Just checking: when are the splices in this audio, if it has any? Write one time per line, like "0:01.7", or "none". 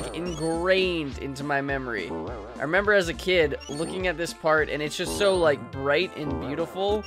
none